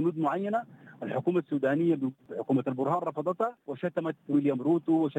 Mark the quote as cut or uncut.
cut